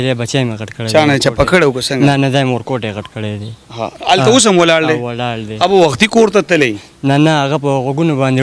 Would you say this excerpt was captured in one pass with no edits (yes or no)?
yes